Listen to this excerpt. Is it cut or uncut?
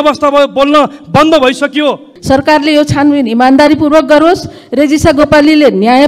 cut